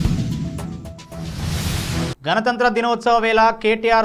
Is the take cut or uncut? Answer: cut